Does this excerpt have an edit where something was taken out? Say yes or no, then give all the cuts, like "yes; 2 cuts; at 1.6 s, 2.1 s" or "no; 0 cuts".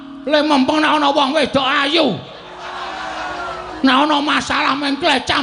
no; 0 cuts